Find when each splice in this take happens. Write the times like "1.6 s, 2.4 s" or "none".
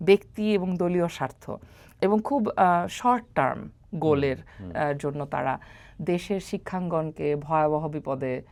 none